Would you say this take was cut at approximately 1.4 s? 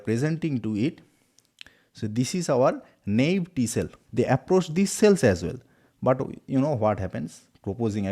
no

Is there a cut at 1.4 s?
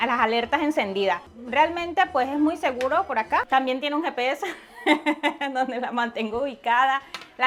no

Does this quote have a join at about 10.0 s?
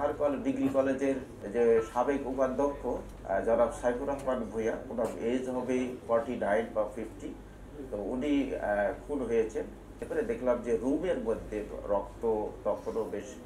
yes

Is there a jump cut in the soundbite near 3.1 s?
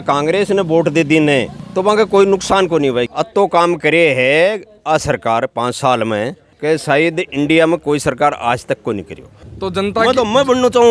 yes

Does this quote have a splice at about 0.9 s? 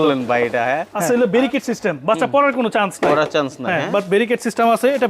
yes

